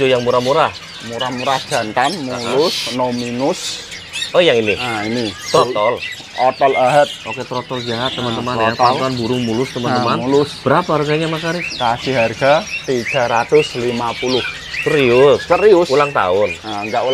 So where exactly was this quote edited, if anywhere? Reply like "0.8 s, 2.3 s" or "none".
none